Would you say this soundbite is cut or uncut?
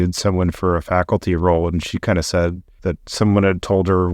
cut